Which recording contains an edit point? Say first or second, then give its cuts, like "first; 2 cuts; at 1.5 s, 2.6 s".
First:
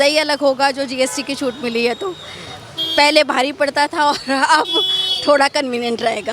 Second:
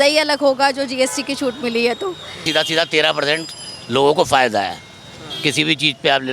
second; 1 cut; at 2.5 s